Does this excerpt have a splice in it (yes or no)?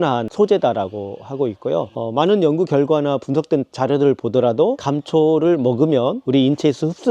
yes